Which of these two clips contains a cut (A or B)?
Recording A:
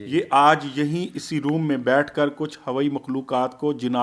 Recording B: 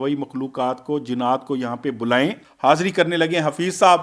B